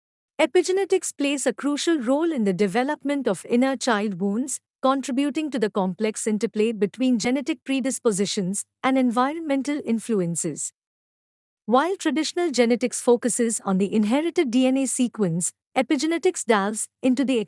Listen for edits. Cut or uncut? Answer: cut